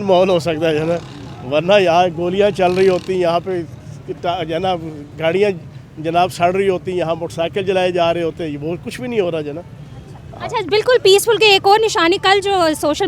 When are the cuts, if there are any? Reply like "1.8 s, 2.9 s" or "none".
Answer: none